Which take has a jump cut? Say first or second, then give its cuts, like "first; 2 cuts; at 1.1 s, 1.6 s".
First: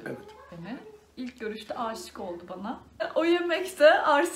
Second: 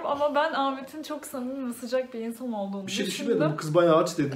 first; 1 cut; at 2.8 s